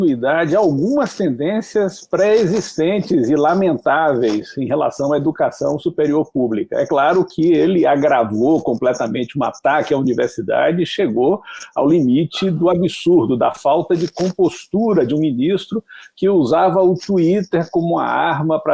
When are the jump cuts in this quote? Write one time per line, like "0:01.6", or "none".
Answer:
none